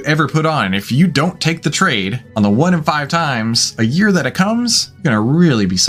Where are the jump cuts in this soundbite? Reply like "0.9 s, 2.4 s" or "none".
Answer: 2.2 s, 4.9 s